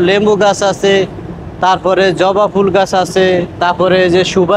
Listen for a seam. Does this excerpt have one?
no; 0 cuts

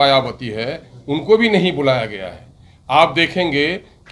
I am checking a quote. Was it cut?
no; 0 cuts

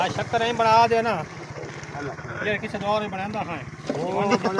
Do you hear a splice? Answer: no; 0 cuts

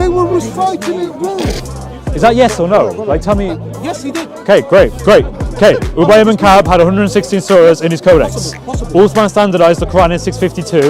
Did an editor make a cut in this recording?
yes; 1 cut; at 1.6 s

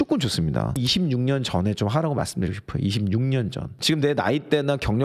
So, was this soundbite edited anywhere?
yes; 2 cuts; at 0.8 s, 3.8 s

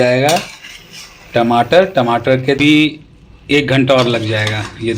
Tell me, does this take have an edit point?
yes; 1 cut; at 2.6 s

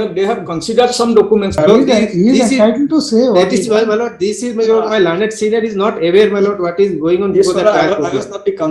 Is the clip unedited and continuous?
no; 1 cut; at 1.6 s

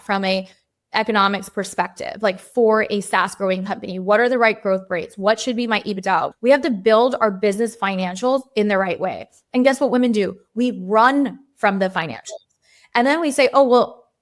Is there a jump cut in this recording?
no; 0 cuts

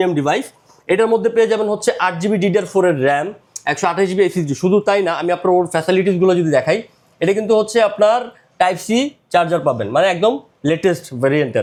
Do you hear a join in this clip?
no; 0 cuts

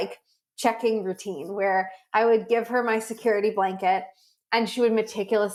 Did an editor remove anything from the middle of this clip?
no; 0 cuts

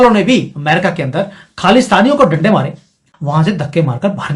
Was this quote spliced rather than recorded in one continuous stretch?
yes; 1 cut; at 3.1 s

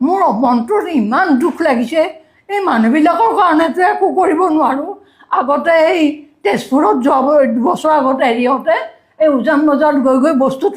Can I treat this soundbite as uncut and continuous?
yes; 0 cuts

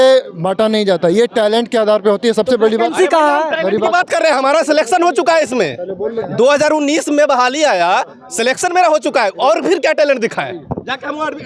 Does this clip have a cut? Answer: no; 0 cuts

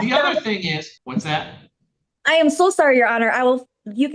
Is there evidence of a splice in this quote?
yes; 1 cut; at 1.0 s

